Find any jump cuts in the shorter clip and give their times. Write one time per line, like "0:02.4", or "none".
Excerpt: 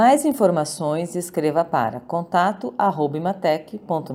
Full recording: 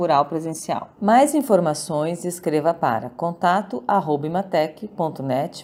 none